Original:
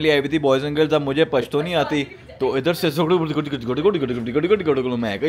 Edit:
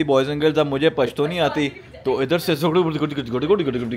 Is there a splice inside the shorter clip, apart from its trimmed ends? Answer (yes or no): no